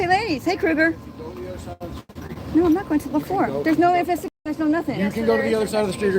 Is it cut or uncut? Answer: uncut